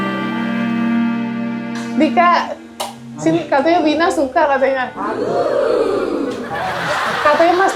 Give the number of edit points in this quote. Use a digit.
1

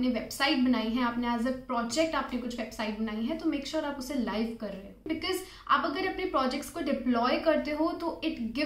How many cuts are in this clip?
1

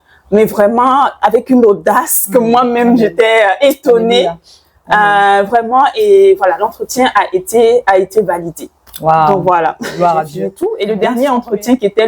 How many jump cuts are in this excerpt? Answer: 1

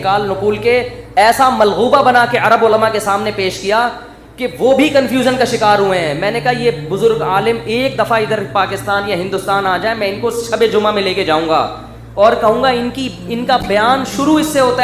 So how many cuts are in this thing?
0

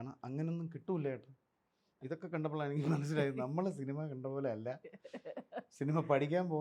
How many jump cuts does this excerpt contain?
1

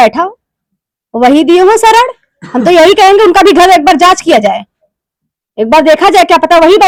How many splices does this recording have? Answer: 0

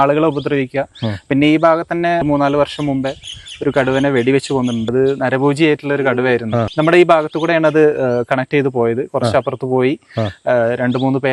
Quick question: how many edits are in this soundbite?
3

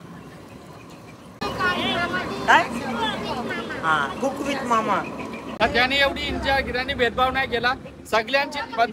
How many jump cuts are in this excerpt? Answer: 2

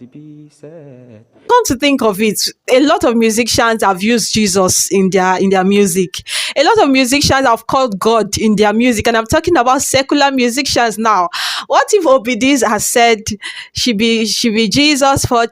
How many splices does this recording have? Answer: 1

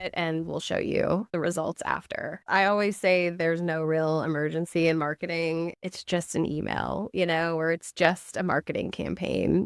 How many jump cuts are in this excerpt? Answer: 2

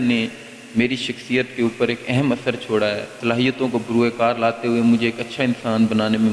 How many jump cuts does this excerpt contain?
1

